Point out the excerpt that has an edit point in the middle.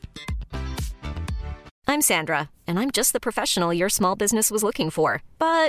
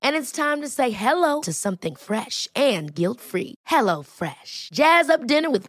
first; 1 cut; at 1.7 s

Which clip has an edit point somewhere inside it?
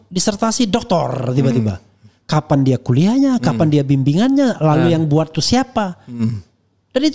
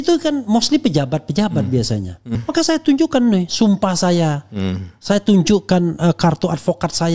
second; 1 cut; at 2.4 s

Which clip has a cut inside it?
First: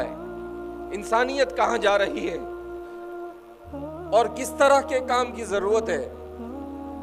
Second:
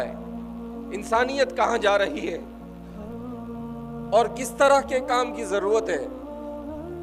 second; 3 cuts; at 2.4 s, 3.8 s, 6.1 s

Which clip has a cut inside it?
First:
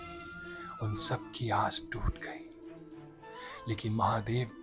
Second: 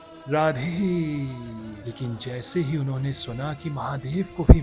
second; 1 cut; at 1.8 s

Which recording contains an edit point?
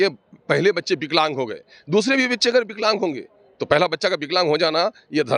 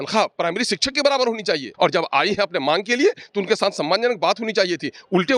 second; 1 cut; at 1.7 s

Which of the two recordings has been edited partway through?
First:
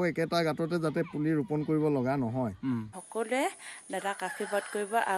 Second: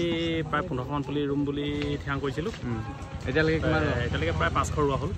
first; 1 cut; at 3.0 s

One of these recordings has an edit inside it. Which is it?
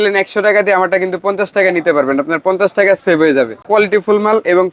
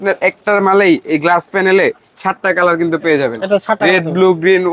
first; 1 cut; at 3.7 s

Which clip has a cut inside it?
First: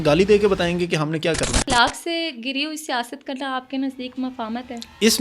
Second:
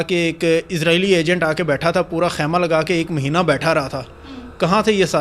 first; 1 cut; at 1.6 s

